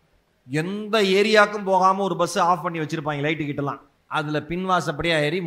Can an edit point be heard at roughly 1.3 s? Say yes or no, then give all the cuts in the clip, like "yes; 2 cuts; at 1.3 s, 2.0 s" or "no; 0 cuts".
no; 1 cut; at 3.9 s